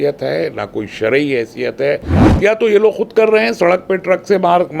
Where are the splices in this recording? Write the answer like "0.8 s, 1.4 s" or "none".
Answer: 2.3 s